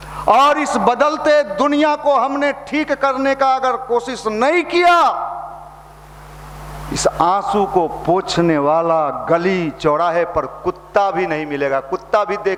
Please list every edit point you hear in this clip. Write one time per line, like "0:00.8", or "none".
none